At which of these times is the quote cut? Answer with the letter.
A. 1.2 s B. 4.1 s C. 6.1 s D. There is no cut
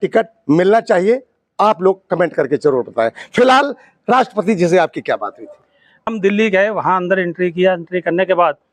C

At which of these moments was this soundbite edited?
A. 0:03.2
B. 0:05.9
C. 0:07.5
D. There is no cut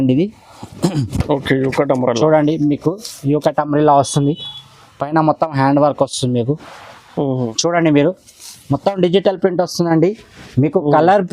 C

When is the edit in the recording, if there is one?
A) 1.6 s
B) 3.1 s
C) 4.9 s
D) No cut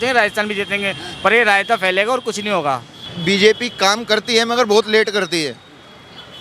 B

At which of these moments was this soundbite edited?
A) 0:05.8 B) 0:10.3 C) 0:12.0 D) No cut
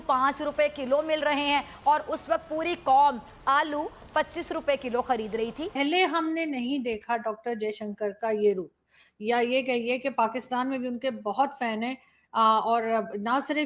A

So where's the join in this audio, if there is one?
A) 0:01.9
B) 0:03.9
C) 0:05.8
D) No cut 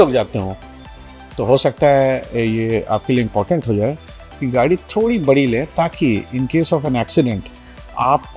D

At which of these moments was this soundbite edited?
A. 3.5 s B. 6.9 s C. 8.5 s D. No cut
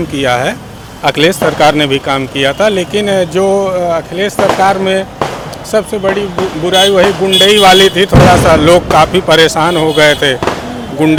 D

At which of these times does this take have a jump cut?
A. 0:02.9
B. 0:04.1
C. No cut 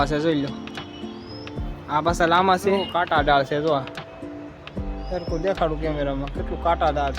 A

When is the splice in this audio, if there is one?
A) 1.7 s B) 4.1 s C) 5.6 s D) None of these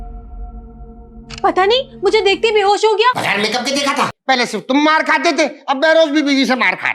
B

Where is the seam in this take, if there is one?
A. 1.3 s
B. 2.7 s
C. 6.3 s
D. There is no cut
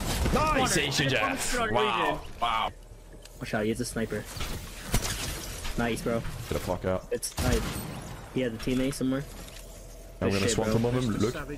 B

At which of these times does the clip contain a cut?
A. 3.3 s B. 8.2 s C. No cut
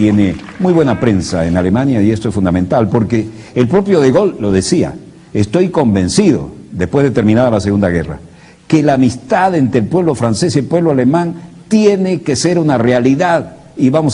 B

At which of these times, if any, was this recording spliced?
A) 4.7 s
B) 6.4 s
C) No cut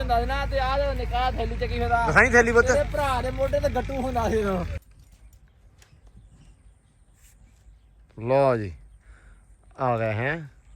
A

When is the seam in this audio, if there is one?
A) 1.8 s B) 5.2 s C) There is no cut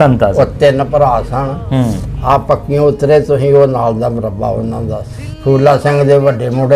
B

